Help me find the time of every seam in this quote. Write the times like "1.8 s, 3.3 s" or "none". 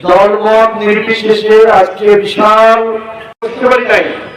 3.4 s